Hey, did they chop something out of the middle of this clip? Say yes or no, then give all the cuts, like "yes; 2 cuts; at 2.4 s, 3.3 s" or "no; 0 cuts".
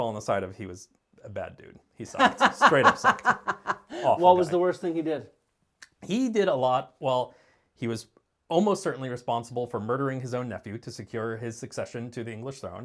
no; 0 cuts